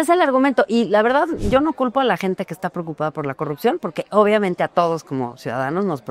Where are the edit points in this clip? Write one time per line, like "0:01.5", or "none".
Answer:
none